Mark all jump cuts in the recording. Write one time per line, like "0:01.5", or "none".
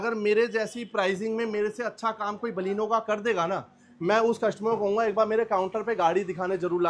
none